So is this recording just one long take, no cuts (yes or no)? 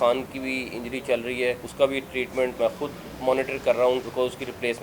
no